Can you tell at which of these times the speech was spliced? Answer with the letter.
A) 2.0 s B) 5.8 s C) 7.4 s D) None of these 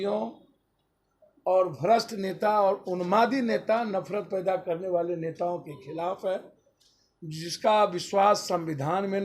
D